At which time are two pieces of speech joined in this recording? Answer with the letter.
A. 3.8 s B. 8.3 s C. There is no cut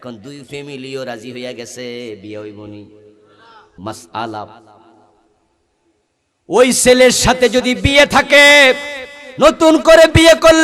A